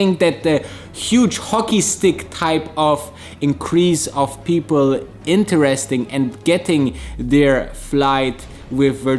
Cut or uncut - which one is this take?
uncut